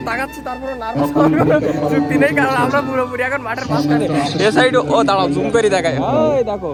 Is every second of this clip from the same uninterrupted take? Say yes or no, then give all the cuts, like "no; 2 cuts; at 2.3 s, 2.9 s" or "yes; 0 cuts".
yes; 0 cuts